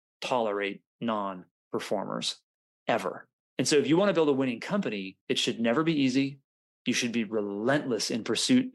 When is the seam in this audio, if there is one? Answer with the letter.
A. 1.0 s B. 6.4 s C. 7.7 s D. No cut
D